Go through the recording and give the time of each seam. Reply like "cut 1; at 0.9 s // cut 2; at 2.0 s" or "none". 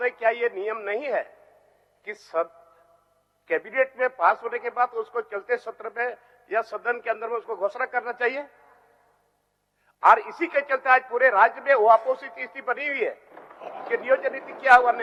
none